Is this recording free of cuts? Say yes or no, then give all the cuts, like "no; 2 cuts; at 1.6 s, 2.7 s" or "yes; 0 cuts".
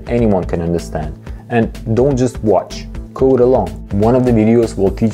yes; 0 cuts